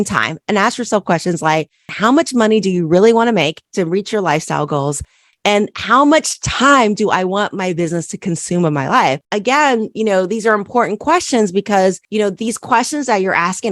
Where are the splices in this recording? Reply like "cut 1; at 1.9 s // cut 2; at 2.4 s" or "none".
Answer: cut 1; at 1.9 s // cut 2; at 3.6 s // cut 3; at 9.2 s